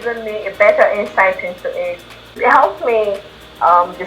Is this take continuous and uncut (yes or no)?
no